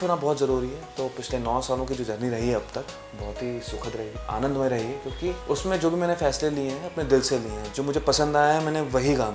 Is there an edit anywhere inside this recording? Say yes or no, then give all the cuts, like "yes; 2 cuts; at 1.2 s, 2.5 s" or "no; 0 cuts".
no; 0 cuts